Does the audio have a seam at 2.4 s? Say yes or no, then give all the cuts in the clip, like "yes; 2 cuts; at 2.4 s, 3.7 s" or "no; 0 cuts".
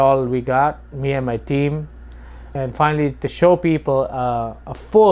yes; 1 cut; at 2.4 s